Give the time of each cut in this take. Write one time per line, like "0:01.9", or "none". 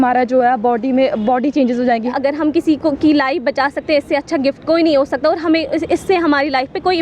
0:02.1